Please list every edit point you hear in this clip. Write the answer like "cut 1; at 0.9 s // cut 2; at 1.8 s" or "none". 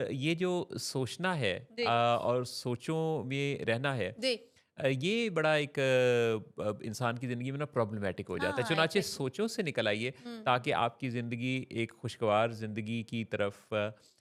none